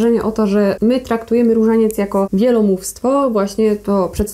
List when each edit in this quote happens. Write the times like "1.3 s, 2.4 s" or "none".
0.8 s, 2.3 s